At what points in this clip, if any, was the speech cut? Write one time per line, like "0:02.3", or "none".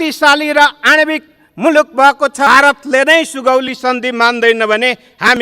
0:02.5